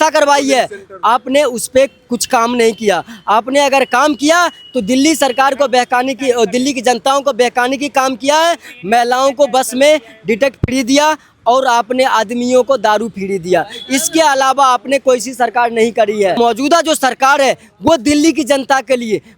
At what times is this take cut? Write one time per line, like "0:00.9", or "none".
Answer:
0:16.4